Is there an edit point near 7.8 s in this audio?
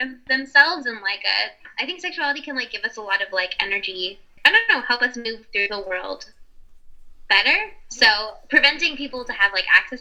no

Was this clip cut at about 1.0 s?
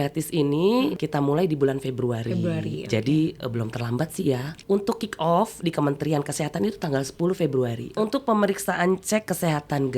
yes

